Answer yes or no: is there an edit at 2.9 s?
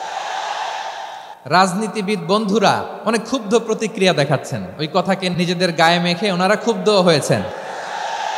yes